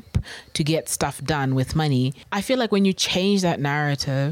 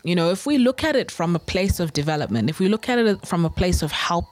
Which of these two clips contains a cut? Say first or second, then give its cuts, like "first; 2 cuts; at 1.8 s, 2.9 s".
first; 1 cut; at 2.2 s